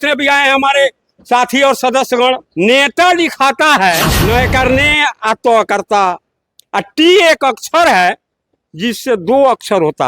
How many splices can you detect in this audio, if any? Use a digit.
2